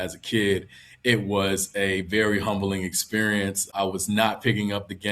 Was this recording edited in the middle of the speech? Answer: yes; 1 cut; at 3.7 s

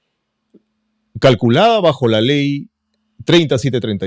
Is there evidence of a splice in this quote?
no; 0 cuts

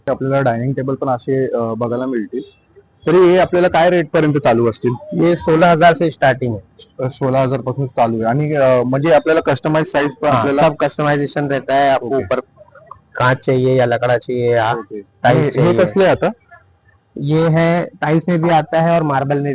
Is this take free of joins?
yes; 0 cuts

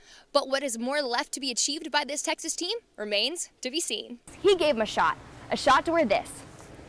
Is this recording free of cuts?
no; 1 cut; at 4.3 s

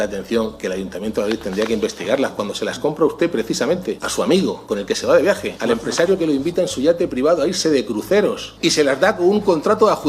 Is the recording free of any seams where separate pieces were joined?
no; 4 cuts; at 4.0 s, 4.6 s, 5.5 s, 8.5 s

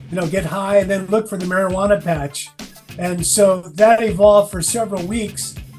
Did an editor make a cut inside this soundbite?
no; 0 cuts

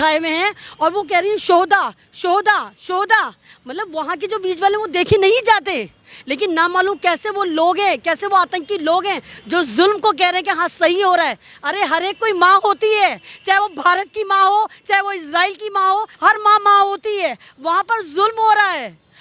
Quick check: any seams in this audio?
no; 0 cuts

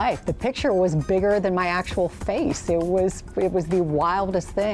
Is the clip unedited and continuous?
no; 1 cut; at 2.4 s

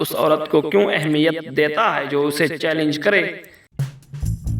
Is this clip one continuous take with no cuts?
no; 1 cut; at 3.6 s

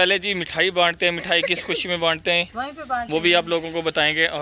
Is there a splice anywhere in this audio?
no; 0 cuts

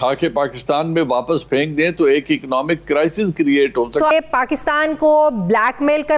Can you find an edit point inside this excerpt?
yes; 1 cut; at 4.1 s

